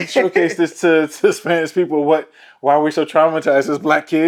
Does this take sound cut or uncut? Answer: uncut